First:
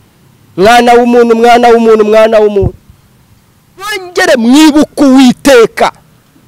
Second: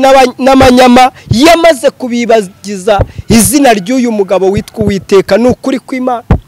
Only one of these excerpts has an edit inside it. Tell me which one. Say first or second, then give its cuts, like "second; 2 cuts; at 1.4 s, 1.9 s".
first; 1 cut; at 4.1 s